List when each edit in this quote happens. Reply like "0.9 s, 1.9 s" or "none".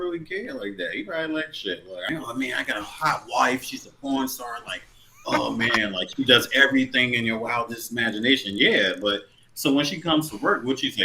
2.0 s